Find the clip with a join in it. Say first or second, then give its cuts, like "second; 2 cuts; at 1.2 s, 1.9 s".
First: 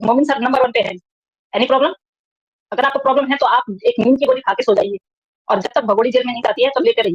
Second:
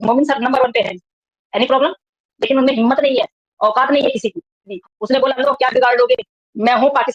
second; 2 cuts; at 2.3 s, 4.8 s